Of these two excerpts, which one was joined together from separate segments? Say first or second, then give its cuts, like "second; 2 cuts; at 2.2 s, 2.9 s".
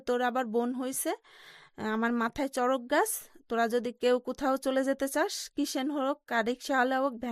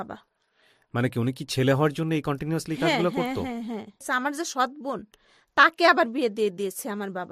second; 1 cut; at 4.0 s